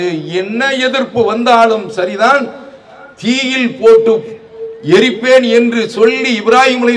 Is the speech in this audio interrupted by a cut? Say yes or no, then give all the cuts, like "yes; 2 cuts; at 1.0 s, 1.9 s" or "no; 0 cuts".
no; 0 cuts